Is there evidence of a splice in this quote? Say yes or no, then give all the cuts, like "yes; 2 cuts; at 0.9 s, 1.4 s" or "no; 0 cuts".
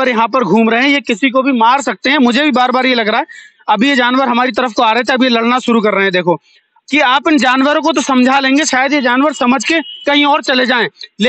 yes; 1 cut; at 6.7 s